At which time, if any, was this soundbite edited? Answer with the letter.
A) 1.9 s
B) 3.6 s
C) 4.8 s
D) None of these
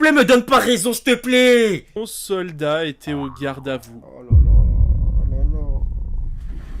A